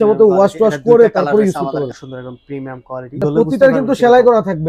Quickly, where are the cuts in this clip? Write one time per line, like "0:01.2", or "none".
0:02.6